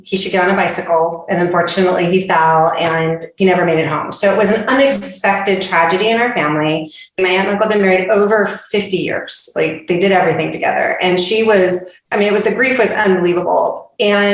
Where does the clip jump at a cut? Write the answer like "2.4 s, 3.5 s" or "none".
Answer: 7.2 s, 12.1 s